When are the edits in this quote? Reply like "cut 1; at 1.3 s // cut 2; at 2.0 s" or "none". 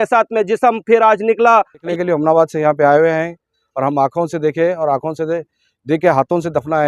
cut 1; at 1.9 s